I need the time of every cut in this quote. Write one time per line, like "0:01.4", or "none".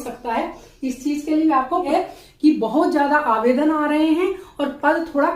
0:01.9